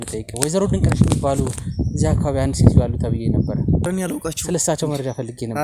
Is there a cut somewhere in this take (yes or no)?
yes